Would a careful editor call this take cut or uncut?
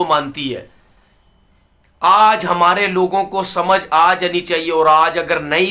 uncut